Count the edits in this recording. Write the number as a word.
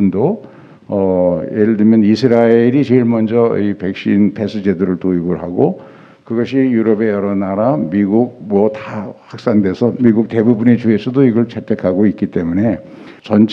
zero